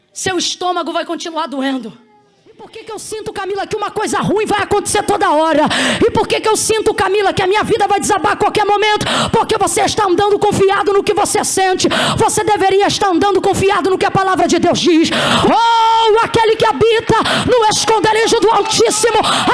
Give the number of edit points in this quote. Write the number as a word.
two